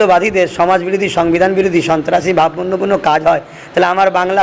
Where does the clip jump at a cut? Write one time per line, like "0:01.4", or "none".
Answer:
none